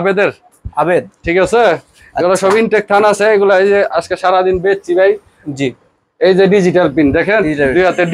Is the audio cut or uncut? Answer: uncut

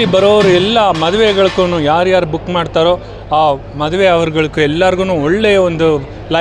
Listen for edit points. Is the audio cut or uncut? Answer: uncut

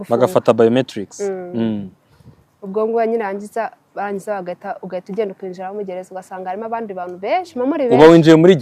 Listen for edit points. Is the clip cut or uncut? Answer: uncut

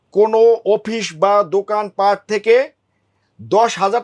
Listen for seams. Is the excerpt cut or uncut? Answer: uncut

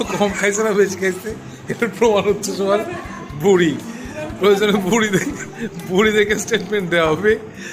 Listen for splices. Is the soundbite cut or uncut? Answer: uncut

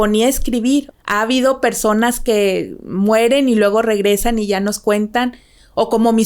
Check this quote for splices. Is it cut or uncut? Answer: cut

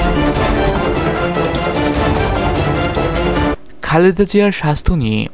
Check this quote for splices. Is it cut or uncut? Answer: cut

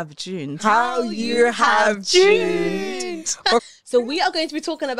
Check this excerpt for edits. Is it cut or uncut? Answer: cut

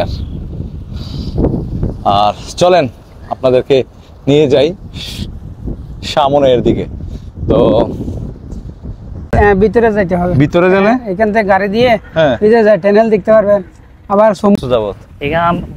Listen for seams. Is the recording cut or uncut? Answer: cut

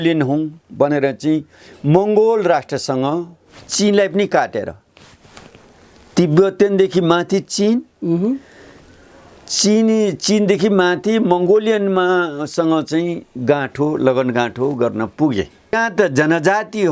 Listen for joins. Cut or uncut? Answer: cut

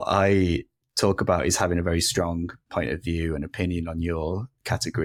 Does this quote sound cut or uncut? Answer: uncut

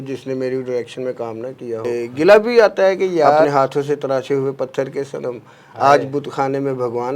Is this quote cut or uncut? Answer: cut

